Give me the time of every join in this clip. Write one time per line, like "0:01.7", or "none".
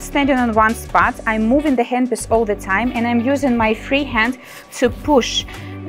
none